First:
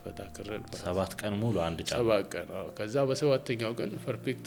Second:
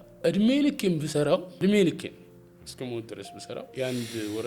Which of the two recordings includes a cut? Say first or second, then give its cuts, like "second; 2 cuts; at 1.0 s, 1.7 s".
second; 2 cuts; at 1.5 s, 3.7 s